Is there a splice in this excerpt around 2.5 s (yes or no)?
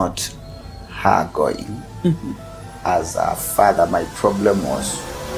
no